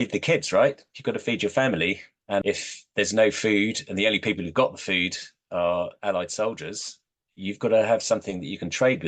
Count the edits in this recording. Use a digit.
1